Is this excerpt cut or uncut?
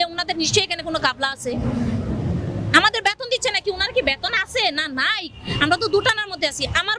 uncut